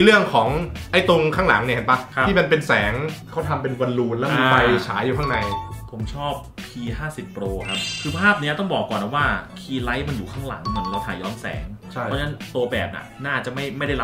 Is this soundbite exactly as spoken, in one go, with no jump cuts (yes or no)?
yes